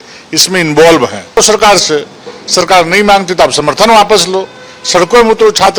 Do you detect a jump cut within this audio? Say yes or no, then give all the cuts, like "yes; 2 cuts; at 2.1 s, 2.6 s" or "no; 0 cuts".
no; 0 cuts